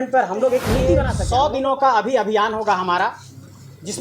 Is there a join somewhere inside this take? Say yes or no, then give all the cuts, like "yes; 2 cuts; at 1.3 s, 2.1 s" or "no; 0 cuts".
yes; 1 cut; at 1.2 s